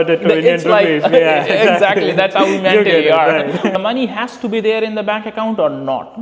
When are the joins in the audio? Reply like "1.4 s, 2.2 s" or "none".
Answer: 3.8 s